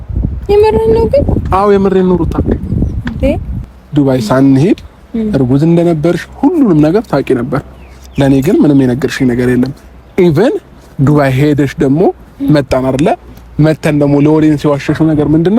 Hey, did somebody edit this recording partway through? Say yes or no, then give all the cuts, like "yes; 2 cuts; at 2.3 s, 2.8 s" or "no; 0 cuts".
yes; 1 cut; at 3.5 s